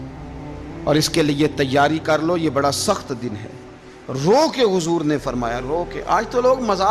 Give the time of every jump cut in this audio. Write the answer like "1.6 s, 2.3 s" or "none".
none